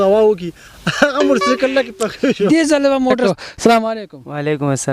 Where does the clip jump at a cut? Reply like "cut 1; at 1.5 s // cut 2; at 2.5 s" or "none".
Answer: cut 1; at 3.2 s